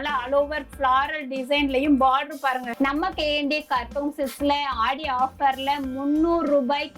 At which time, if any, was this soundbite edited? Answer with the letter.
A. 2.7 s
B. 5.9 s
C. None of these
A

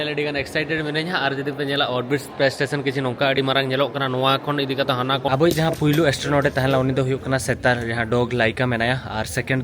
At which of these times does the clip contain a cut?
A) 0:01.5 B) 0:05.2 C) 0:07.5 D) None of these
B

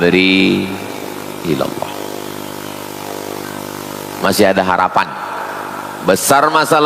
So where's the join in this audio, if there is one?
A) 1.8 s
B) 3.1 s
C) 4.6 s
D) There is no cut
D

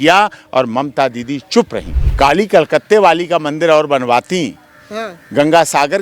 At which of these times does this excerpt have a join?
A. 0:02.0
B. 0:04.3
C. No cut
A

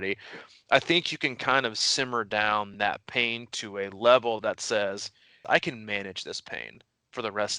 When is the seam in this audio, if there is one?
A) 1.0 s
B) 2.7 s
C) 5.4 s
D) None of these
C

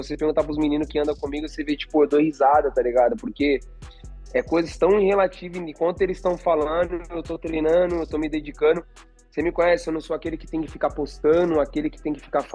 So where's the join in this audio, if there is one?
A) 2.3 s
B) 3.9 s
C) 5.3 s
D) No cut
D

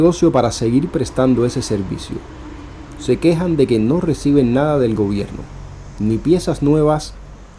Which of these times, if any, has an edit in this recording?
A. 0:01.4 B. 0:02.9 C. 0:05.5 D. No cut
D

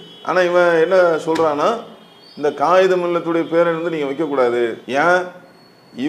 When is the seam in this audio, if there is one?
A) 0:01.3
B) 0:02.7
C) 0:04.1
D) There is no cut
D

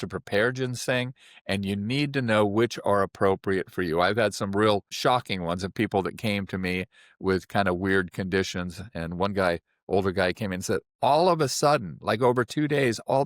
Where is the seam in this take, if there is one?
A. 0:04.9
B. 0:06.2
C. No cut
A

